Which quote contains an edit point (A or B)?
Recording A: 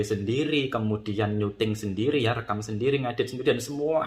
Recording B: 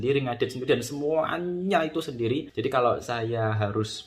B